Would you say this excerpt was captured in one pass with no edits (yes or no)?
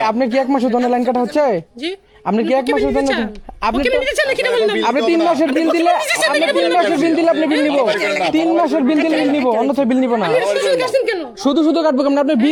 yes